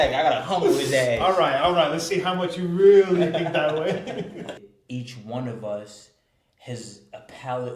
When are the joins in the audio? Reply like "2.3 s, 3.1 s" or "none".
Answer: 4.6 s